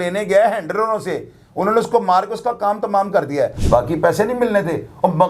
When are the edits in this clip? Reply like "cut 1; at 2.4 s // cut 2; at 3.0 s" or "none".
cut 1; at 3.6 s